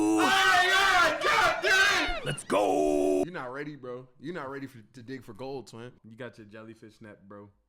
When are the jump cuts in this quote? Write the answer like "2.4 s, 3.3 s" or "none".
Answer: 3.2 s, 6.0 s

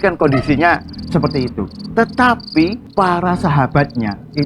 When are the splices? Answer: 2.8 s

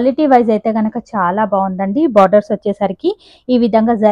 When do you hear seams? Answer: none

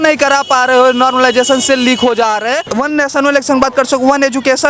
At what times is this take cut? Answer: 2.6 s

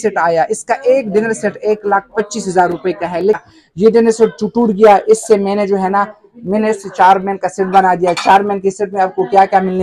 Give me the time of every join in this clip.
3.4 s

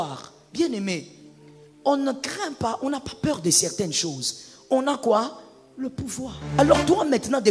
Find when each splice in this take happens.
6.4 s

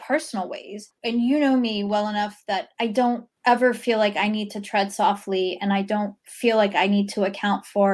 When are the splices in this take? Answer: 0.9 s, 2.9 s

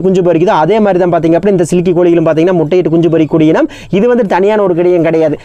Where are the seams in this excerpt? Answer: none

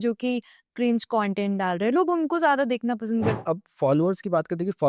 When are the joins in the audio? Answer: 3.4 s

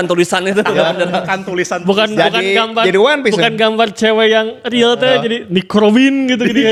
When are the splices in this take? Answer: none

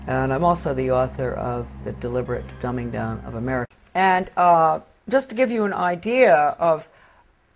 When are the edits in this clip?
3.8 s

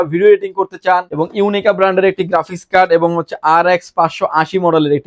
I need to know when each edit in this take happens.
1.1 s

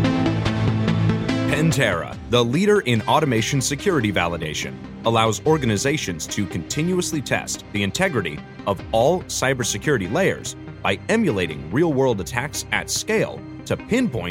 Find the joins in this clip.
1.5 s

